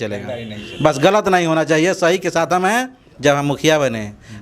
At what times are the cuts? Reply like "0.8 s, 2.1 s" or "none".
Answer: 3.0 s